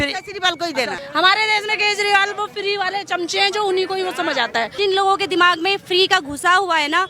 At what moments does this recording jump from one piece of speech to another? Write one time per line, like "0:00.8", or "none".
0:01.0
0:04.8